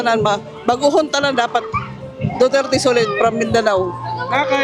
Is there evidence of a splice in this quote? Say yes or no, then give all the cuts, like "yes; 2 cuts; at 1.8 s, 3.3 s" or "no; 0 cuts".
no; 0 cuts